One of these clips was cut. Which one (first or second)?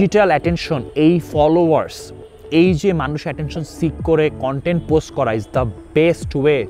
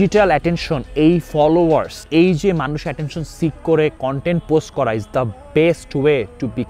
second